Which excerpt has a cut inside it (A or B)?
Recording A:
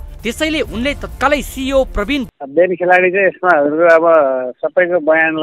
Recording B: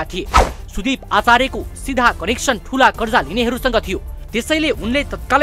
A